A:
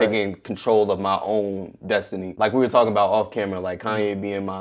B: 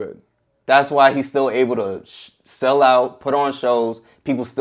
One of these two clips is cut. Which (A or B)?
A